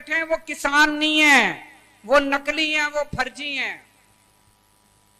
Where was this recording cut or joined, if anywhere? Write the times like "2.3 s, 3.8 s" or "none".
none